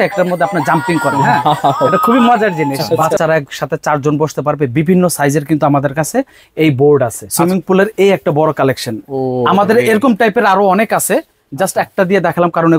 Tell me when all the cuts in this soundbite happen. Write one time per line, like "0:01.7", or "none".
0:03.1
0:07.2